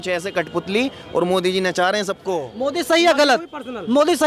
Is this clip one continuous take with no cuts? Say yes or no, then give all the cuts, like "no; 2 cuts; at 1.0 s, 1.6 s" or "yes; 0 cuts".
no; 1 cut; at 2.5 s